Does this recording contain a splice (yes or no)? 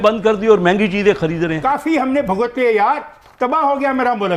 yes